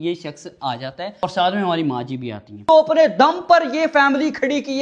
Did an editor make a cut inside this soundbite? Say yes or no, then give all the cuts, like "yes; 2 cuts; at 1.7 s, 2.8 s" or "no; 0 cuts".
yes; 1 cut; at 2.6 s